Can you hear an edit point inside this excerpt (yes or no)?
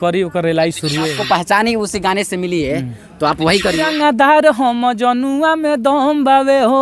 yes